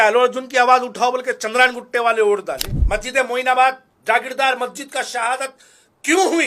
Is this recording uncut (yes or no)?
no